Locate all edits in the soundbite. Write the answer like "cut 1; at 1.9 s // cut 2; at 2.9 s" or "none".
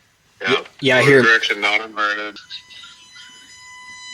cut 1; at 2.4 s